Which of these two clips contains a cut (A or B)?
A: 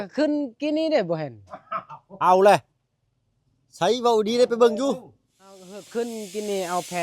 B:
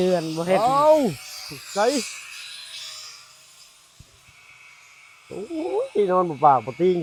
A